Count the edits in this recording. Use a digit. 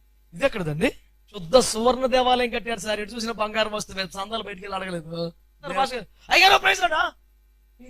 2